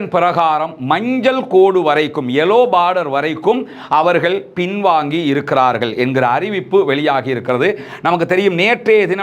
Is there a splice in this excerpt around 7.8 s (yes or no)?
no